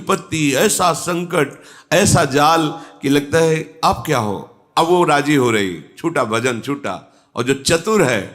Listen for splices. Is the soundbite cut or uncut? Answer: uncut